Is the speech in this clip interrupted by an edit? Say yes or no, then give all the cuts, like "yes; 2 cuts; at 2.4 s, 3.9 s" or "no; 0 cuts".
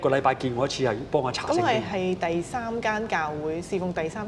no; 0 cuts